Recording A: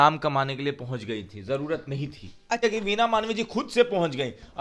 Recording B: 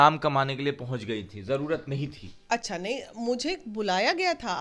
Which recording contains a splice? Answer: A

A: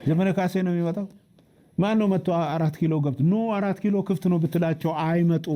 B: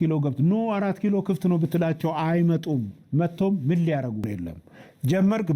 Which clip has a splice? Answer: B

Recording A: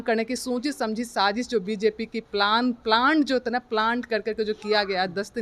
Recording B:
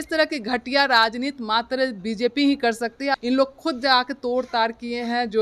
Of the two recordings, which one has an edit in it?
B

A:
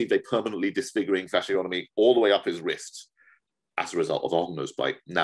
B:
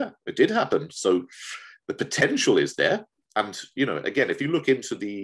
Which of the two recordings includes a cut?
B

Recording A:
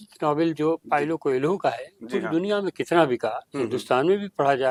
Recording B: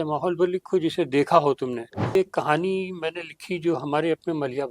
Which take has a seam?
B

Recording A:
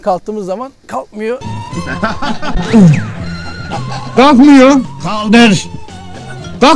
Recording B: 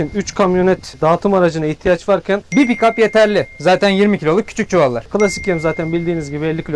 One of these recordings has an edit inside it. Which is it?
B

